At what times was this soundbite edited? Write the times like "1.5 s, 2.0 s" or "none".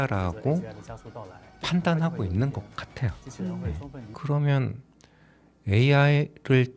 4.1 s